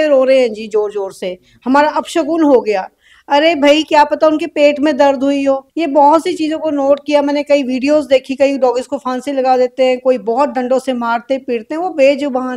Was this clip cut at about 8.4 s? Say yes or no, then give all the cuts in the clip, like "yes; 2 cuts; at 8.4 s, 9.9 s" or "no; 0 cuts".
no; 1 cut; at 5.7 s